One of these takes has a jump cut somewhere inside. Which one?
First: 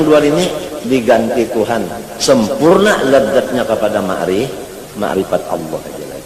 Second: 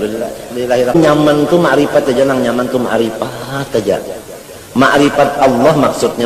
second; 1 cut; at 0.9 s

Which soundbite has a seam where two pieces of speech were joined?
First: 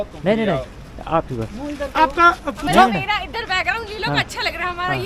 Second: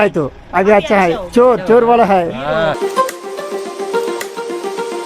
second; 1 cut; at 2.8 s

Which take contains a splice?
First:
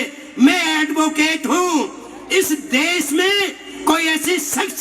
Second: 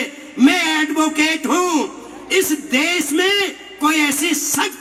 first; 1 cut; at 3.7 s

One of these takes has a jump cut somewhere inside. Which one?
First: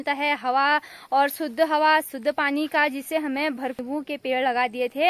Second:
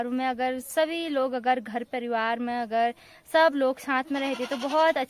first; 1 cut; at 3.8 s

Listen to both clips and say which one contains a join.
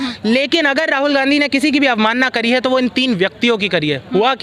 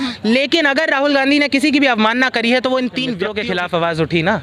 second; 1 cut; at 3.3 s

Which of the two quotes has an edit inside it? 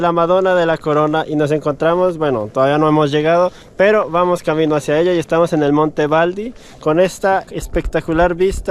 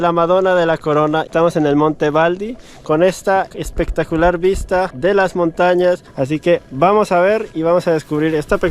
second; 2 cuts; at 1.3 s, 6.1 s

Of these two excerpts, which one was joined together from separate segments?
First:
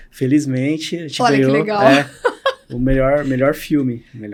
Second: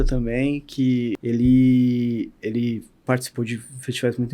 second; 1 cut; at 1.2 s

